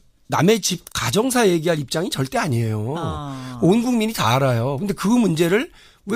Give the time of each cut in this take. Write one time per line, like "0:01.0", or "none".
none

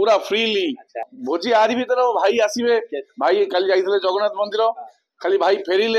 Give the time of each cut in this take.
0:01.1

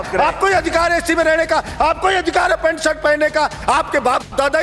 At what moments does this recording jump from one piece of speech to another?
none

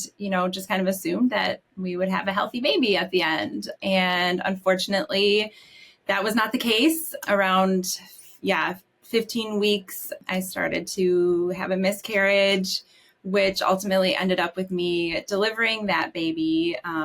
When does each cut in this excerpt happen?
0:03.7
0:07.1
0:10.2

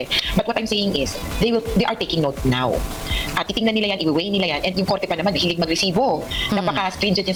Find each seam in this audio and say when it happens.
none

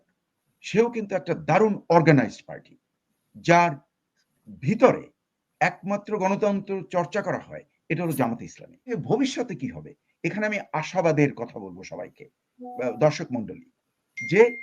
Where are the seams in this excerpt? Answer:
0:08.9

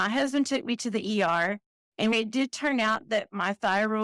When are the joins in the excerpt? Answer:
0:02.1

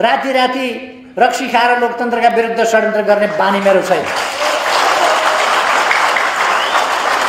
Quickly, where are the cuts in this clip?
none

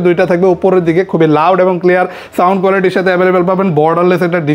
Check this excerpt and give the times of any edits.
none

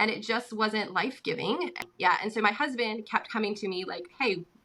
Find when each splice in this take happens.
0:01.8

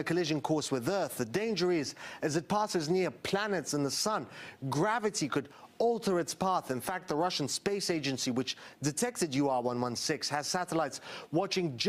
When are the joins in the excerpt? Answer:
none

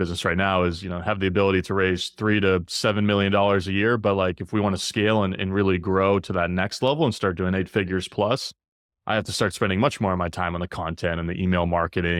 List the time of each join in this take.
none

